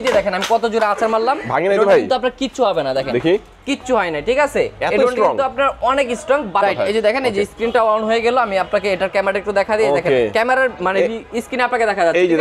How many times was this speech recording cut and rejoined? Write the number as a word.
one